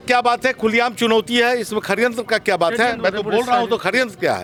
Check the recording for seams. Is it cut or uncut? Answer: uncut